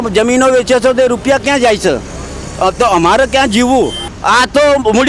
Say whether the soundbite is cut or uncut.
cut